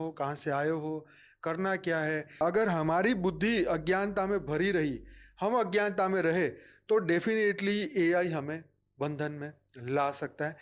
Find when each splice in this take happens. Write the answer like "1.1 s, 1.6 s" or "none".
2.4 s